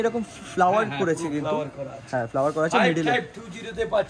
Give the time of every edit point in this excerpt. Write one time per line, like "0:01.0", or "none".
none